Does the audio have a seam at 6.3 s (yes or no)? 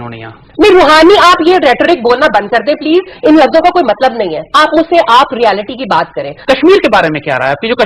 yes